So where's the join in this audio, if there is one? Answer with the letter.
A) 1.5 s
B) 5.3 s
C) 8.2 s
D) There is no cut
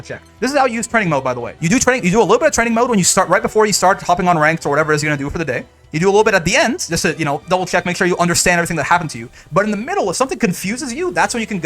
A